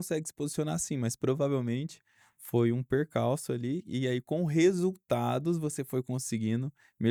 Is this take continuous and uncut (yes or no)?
yes